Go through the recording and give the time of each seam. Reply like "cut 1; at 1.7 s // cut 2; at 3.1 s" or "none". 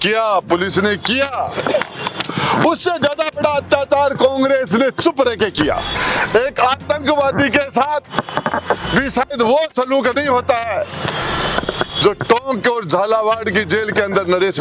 cut 1; at 5.9 s